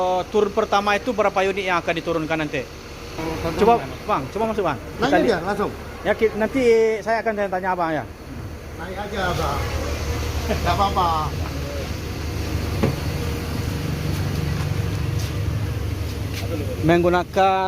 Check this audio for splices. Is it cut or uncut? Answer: cut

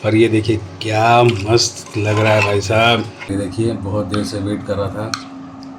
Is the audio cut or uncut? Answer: cut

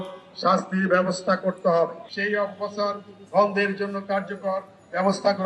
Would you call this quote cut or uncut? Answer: cut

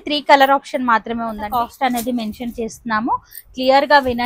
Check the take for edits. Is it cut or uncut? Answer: cut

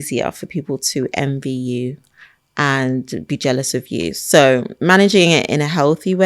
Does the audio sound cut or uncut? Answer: uncut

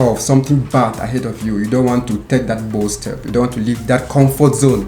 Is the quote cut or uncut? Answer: uncut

